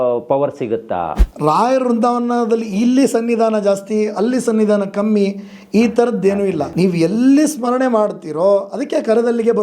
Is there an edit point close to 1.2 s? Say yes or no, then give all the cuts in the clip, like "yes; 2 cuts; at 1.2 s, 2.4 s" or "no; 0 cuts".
yes; 2 cuts; at 1.2 s, 6.7 s